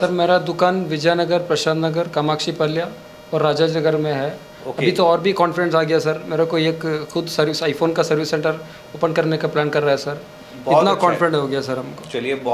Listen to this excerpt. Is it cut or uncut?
uncut